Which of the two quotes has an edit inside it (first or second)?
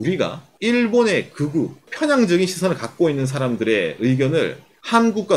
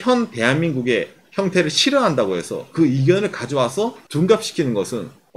first